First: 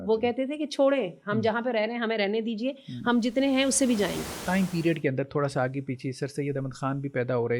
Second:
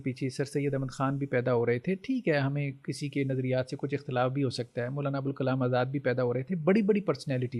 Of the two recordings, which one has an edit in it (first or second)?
first